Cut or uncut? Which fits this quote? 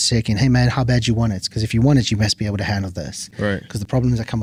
uncut